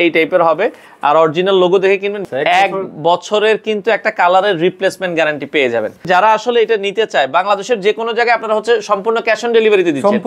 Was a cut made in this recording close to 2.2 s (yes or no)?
yes